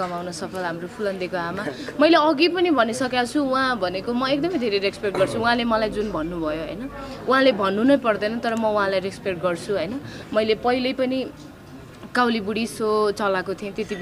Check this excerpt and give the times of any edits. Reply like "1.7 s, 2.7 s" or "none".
none